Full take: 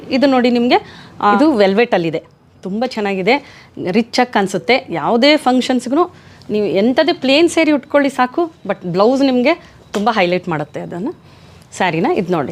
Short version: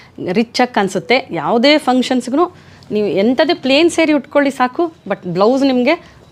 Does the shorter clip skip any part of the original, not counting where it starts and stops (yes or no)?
no